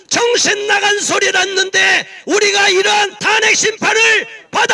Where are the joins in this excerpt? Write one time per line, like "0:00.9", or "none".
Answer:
0:03.2